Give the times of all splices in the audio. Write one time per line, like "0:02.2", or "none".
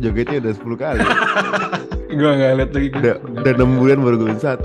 0:01.9

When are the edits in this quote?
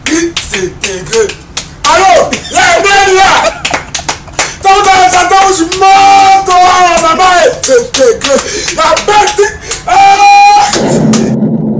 0:10.7

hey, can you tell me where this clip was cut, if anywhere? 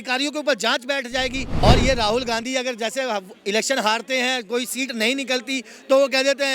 0:01.6

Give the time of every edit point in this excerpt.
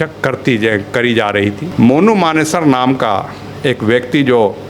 0:01.6

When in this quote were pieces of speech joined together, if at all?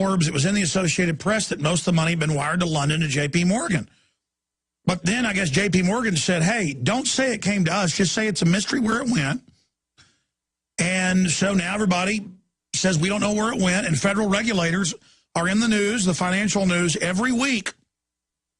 0:01.2

